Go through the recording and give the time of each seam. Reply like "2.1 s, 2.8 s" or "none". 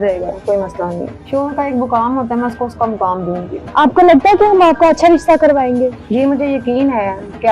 1.3 s, 3.6 s